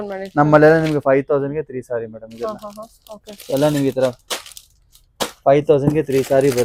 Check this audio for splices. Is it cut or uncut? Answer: uncut